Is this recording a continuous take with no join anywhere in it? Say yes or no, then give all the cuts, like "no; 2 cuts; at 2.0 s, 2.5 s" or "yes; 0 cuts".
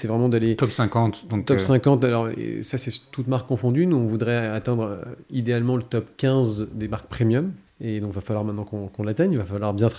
no; 1 cut; at 7.7 s